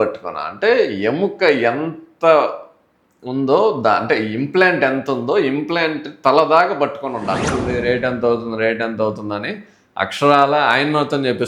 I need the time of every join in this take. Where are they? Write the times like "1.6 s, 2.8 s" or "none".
7.5 s